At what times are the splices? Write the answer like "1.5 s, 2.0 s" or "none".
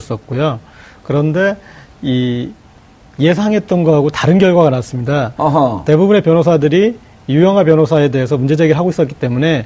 none